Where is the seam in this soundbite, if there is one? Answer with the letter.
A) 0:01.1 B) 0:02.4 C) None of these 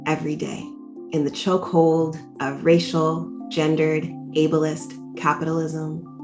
A